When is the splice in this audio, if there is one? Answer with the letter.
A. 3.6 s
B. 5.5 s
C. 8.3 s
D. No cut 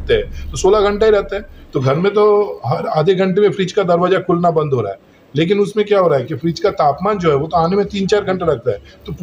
D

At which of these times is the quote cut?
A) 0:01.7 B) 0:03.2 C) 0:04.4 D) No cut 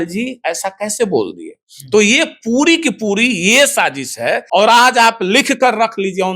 C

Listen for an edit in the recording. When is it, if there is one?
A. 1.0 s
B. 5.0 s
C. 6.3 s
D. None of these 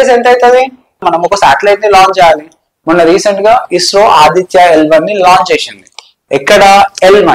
A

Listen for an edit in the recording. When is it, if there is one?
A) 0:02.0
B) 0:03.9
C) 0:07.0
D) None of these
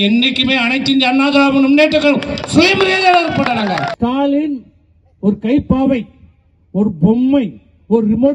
B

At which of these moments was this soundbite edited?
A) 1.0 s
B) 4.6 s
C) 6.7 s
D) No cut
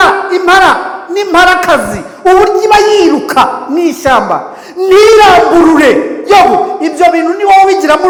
D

